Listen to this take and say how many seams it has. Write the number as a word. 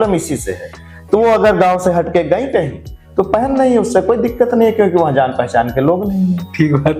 zero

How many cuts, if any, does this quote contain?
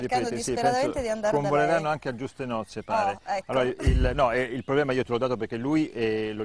zero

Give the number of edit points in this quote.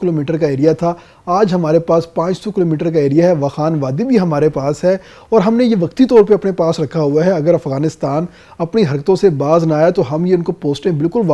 zero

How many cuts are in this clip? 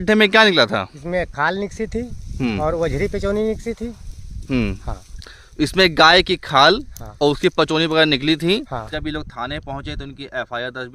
one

